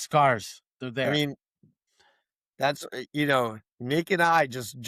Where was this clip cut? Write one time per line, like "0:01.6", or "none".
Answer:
none